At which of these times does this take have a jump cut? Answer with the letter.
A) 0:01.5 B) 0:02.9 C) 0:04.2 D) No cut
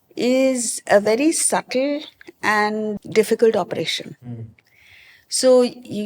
B